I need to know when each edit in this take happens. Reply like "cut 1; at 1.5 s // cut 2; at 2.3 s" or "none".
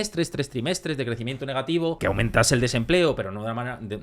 cut 1; at 2.0 s

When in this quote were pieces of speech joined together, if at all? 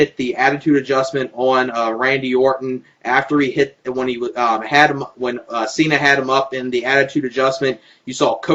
cut 1; at 2.8 s

